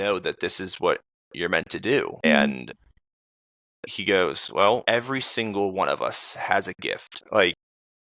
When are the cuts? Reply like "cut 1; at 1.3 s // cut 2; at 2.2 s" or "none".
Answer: cut 1; at 2.2 s // cut 2; at 4.8 s // cut 3; at 7.1 s